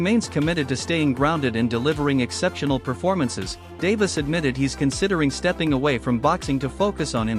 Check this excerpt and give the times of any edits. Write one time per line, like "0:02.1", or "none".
none